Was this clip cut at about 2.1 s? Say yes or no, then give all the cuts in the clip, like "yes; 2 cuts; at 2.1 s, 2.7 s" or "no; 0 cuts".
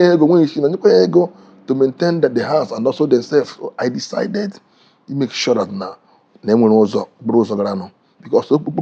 no; 1 cut; at 3.6 s